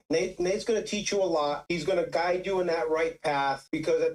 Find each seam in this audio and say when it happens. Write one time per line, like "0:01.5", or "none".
none